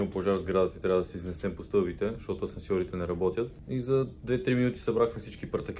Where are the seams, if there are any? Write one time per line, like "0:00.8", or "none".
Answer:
none